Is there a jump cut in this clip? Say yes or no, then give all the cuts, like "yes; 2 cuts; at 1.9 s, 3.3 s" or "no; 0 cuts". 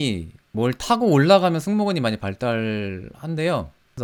no; 0 cuts